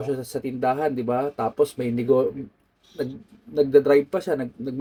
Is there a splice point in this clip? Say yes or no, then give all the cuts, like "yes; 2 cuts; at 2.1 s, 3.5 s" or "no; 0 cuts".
no; 0 cuts